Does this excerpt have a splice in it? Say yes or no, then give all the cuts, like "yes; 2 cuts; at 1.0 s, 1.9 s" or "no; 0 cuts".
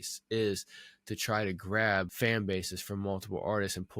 yes; 1 cut; at 2.1 s